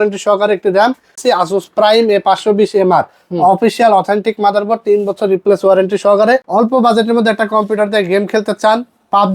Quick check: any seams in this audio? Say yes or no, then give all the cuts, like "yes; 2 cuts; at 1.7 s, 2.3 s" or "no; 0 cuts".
yes; 2 cuts; at 1.2 s, 6.5 s